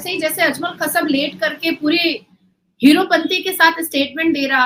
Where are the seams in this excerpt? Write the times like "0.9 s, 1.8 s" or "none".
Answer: none